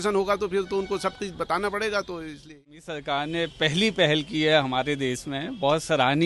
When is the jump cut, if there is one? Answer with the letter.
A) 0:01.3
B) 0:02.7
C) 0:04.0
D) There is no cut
B